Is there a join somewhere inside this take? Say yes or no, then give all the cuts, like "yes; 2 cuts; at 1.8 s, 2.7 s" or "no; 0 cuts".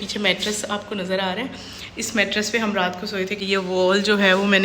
yes; 1 cut; at 3.4 s